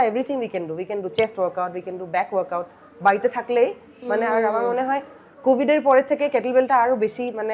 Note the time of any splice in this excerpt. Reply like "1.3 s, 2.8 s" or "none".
none